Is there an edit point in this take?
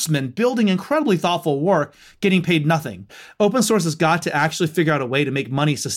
yes; 1 cut; at 3.2 s

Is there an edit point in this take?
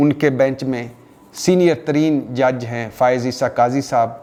no; 0 cuts

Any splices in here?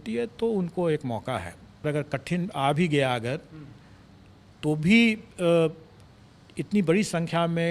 yes; 1 cut; at 1.8 s

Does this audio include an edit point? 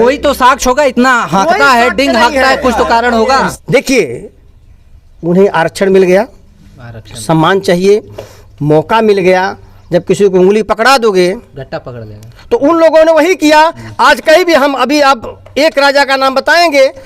yes; 1 cut; at 3.4 s

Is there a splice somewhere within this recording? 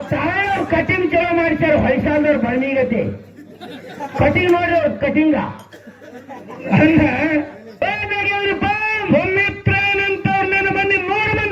yes; 1 cut; at 7.7 s

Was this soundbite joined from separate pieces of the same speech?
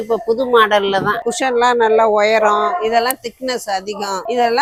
no; 0 cuts

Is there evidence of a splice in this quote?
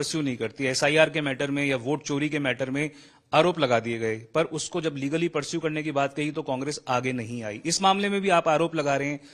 no; 0 cuts

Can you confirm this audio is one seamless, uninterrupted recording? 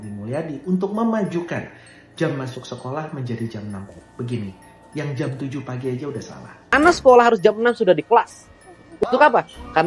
no; 1 cut; at 6.6 s

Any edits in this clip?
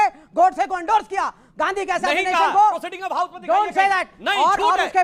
no; 0 cuts

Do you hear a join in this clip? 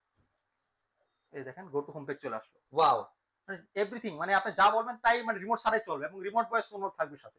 no; 0 cuts

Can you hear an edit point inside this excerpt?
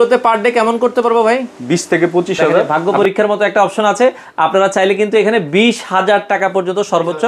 yes; 1 cut; at 2.7 s

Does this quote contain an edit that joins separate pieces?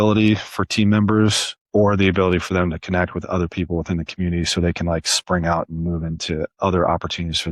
no; 0 cuts

